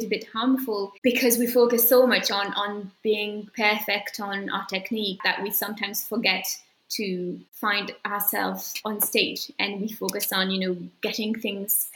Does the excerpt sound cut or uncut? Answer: cut